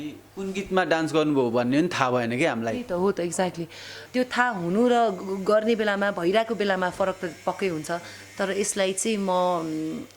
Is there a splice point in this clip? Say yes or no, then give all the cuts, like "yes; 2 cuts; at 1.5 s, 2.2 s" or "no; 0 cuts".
yes; 1 cut; at 3.9 s